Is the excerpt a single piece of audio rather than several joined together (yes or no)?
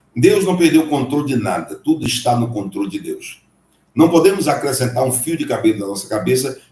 yes